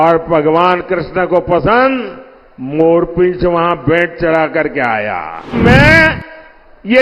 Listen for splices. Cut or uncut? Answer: cut